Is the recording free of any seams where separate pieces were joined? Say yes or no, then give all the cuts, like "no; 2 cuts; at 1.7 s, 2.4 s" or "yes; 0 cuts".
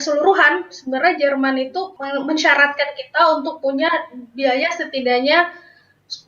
no; 1 cut; at 2.0 s